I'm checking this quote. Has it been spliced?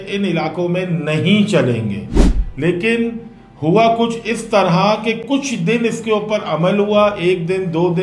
no; 0 cuts

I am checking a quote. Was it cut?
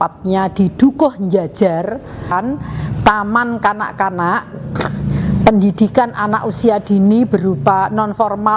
yes; 1 cut; at 2.3 s

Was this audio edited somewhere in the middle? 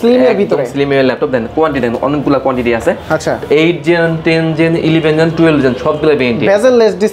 no; 0 cuts

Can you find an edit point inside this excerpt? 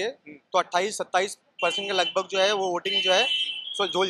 no; 0 cuts

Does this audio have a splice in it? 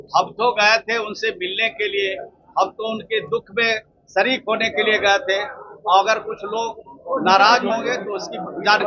no; 0 cuts

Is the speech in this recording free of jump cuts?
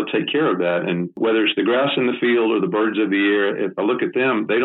no; 1 cut; at 1.2 s

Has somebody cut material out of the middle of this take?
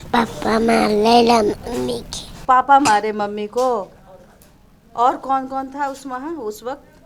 no; 0 cuts

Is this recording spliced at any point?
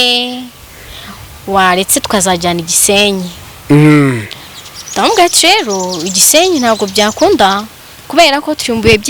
no; 0 cuts

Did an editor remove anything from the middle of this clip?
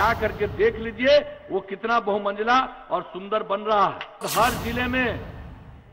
yes; 1 cut; at 4.2 s

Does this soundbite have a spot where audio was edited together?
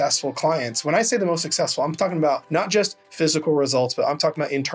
yes; 1 cut; at 2.4 s

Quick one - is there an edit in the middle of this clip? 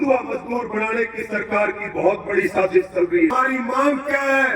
yes; 1 cut; at 3.3 s

